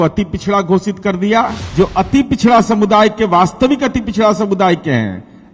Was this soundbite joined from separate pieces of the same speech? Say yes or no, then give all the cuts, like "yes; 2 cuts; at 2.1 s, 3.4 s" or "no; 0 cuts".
yes; 1 cut; at 1.6 s